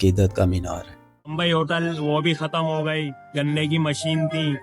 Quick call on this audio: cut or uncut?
cut